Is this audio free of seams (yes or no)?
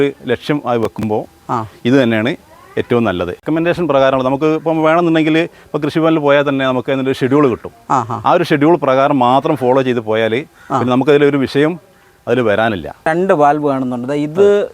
no